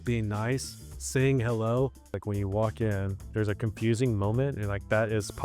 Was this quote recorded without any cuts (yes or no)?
no